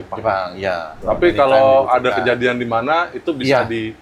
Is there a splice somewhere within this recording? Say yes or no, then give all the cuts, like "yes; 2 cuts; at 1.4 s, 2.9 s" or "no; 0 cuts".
yes; 1 cut; at 0.9 s